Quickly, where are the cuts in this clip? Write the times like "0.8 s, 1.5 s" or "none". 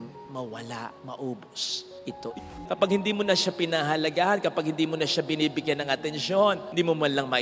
2.5 s